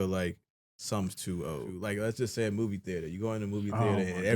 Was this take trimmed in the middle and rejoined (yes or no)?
yes